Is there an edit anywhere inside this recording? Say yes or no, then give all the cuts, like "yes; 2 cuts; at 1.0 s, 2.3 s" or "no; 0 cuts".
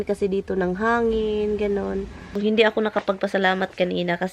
yes; 1 cut; at 2.4 s